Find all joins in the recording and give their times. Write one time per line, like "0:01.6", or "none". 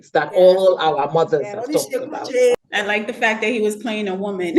0:02.5

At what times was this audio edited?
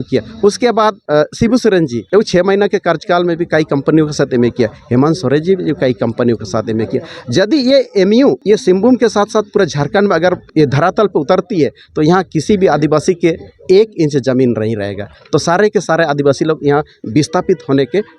0:01.0
0:02.0
0:08.4
0:10.5

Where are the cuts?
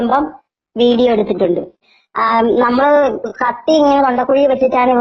none

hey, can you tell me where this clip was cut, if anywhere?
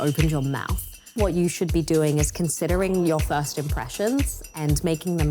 0:01.1
0:04.4

